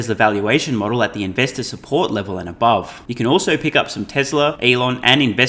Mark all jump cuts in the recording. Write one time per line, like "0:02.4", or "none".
0:03.0
0:04.6